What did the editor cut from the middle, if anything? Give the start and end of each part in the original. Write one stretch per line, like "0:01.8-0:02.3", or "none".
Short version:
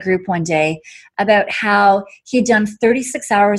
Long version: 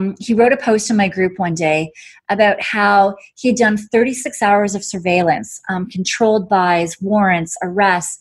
none

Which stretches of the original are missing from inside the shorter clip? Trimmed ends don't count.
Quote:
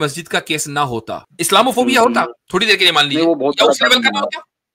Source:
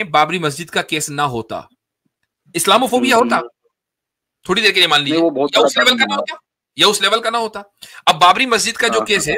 0:01.6-0:02.4
0:03.5-0:04.3

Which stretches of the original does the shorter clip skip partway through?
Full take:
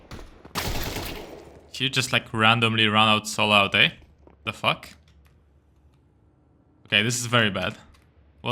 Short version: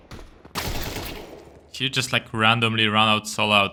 none

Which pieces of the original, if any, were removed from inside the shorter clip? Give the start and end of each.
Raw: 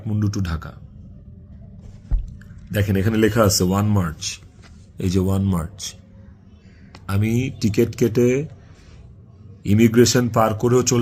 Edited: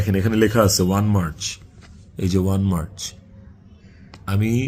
none

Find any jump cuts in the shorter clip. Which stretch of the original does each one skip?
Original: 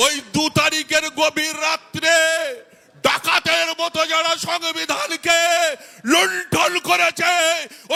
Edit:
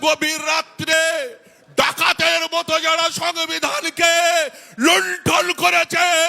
0:02.1-0:02.2

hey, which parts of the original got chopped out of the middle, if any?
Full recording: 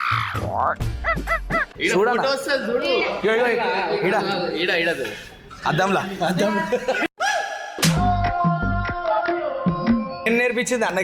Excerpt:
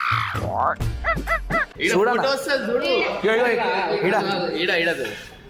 none

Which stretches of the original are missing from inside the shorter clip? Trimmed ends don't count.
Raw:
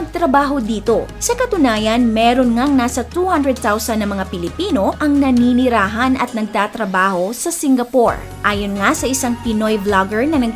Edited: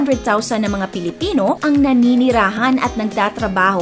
none

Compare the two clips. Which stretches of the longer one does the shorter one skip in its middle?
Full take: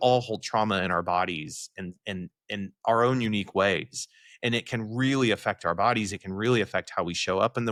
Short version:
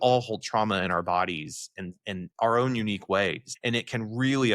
0:02.3-0:02.8
0:03.9-0:04.3

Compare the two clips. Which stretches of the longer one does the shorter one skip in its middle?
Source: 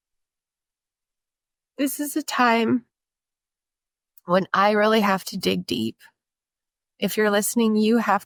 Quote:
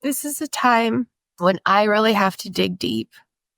0:03.0-0:04.1

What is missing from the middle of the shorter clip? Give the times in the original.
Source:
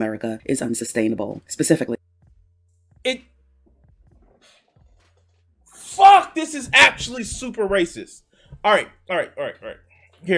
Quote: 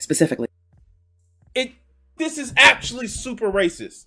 0:03.6-0:06.3

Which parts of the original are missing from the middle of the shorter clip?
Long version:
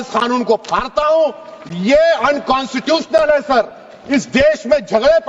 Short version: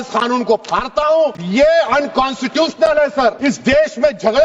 0:01.4-0:01.7
0:03.7-0:04.1

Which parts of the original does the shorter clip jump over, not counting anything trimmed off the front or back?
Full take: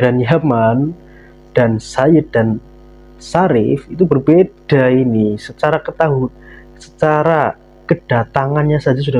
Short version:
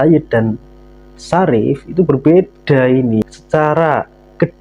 0:05.3-0:06.7

